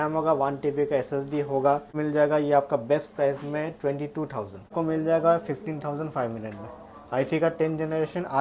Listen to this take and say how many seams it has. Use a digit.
2